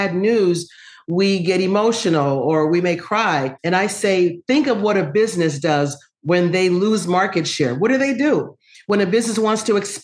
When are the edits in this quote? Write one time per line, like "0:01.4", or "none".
none